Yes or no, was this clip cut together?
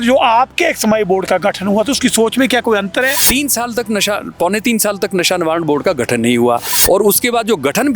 yes